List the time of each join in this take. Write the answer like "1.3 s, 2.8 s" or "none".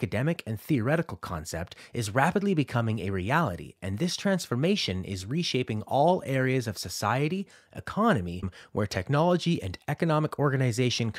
none